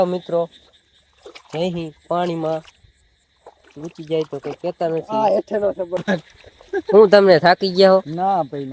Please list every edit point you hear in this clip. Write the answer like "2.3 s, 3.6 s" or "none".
6.0 s